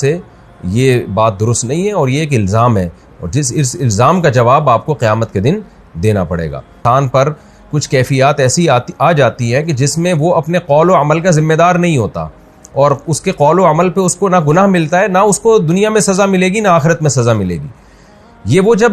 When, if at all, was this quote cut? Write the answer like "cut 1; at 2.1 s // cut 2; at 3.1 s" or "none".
cut 1; at 6.8 s

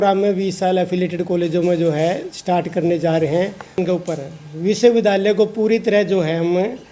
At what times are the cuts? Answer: cut 1; at 3.8 s

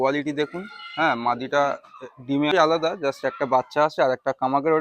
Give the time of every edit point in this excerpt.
cut 1; at 2.5 s

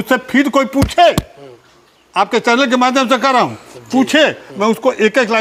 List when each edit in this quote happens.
none

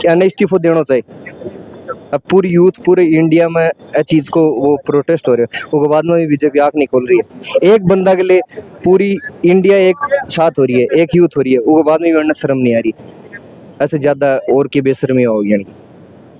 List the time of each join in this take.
none

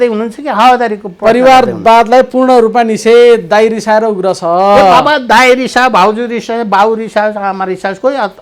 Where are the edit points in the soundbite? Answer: none

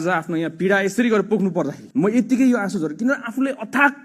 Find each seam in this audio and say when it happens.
cut 1; at 1.8 s

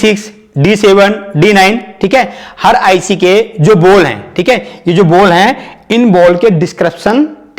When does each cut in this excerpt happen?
none

